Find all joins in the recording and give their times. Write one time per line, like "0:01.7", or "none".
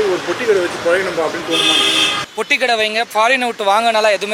0:02.2